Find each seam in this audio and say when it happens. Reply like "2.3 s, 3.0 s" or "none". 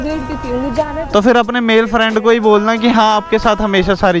1.1 s